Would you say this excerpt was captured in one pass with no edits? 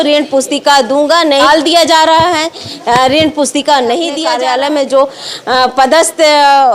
no; 2 cuts; at 1.4 s, 4.2 s

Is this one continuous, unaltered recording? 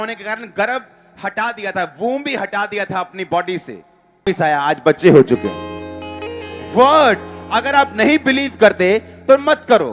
no; 1 cut; at 4.2 s

